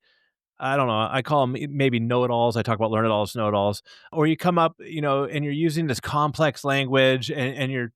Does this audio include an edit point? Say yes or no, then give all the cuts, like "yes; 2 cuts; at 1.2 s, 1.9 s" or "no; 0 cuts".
yes; 1 cut; at 4.1 s